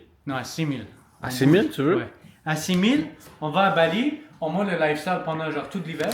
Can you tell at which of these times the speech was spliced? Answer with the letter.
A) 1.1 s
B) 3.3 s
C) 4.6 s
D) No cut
D